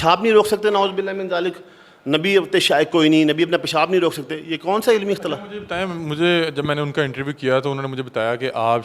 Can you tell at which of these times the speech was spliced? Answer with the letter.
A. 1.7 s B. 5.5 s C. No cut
C